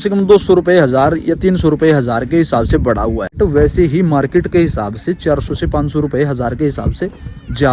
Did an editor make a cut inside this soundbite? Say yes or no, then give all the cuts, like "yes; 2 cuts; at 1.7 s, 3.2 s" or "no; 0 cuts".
yes; 1 cut; at 3.4 s